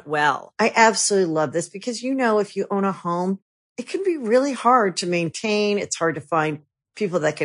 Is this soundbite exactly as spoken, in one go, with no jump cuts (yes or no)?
yes